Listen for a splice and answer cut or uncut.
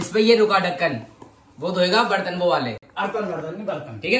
uncut